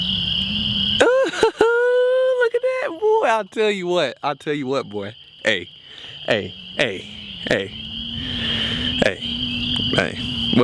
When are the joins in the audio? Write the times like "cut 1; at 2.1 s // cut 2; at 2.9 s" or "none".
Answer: none